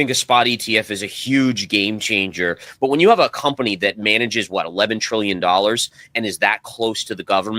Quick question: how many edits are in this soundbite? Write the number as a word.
one